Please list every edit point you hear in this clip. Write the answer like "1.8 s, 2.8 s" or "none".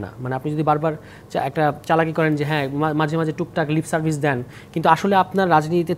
none